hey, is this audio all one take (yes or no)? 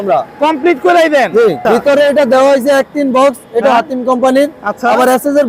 no